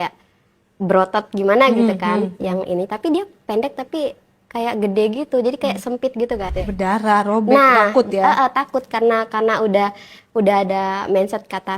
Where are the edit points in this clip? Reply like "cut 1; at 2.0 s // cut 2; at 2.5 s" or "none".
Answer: cut 1; at 6.5 s

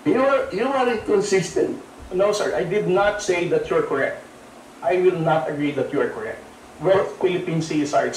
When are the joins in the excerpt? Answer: none

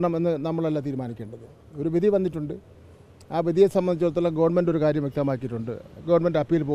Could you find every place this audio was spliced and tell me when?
none

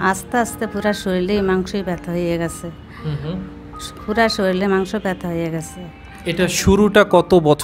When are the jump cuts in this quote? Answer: none

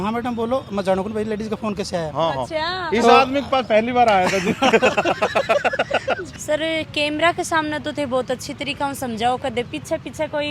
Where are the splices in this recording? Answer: cut 1; at 6.3 s

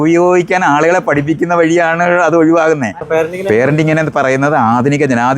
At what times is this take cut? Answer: cut 1; at 3.0 s

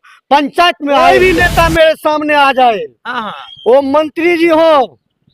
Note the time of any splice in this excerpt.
cut 1; at 1.1 s

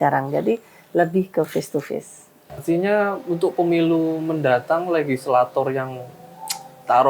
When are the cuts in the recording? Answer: cut 1; at 2.6 s

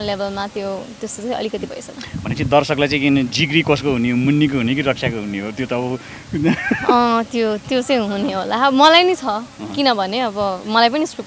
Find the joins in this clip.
none

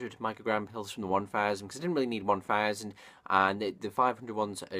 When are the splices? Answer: cut 1; at 1.4 s

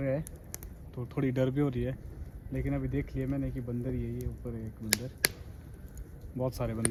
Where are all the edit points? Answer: none

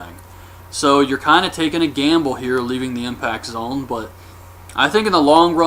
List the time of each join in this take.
none

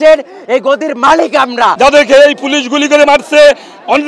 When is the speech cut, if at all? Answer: cut 1; at 1.8 s

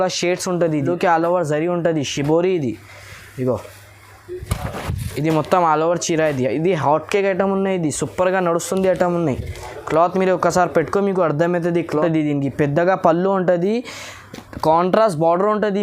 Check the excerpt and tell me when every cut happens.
cut 1; at 0.7 s // cut 2; at 11.9 s

